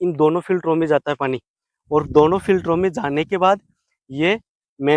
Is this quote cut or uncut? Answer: uncut